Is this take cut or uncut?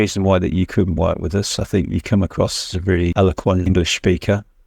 cut